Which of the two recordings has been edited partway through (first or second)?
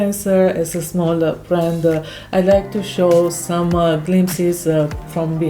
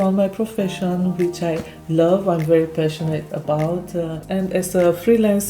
second